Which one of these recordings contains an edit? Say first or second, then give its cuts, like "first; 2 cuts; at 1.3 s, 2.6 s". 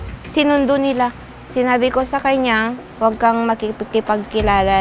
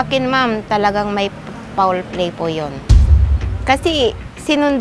first; 1 cut; at 2.8 s